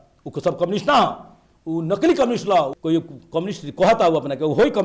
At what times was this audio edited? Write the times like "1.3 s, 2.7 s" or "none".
2.8 s

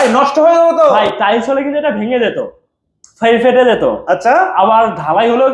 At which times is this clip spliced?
none

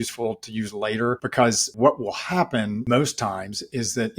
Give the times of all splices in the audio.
1.7 s, 2.8 s

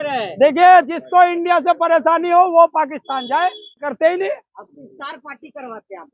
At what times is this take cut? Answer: 3.9 s

